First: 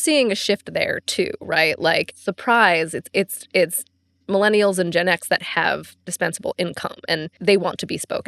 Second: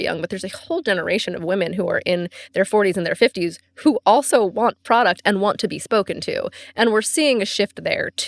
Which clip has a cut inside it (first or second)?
first